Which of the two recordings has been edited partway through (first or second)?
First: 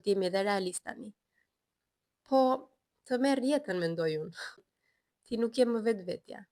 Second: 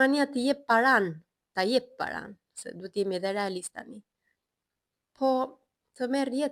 first